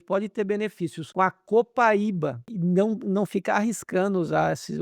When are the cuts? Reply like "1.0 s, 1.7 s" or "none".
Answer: 1.0 s, 2.5 s